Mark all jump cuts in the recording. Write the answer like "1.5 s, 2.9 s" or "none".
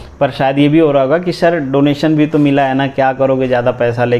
none